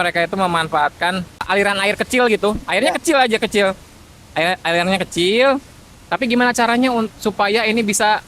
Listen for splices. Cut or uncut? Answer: cut